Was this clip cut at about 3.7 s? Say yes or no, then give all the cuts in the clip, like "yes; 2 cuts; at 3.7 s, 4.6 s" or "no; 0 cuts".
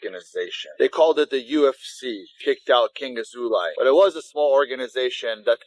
yes; 1 cut; at 3.7 s